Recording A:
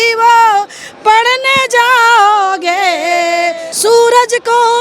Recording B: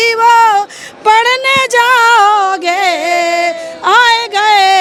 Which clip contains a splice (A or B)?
A